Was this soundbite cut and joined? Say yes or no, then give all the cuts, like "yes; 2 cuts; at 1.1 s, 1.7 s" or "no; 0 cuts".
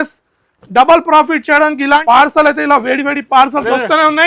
yes; 1 cut; at 2.0 s